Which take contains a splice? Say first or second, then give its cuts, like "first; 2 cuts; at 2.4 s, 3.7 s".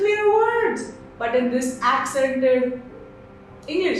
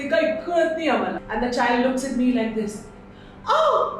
second; 1 cut; at 1.2 s